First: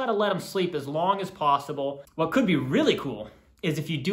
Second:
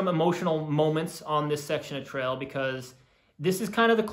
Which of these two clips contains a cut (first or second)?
first